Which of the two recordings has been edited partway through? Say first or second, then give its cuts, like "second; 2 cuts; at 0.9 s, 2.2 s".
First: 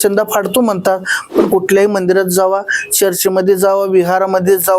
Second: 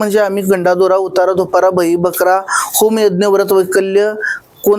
first; 1 cut; at 1.5 s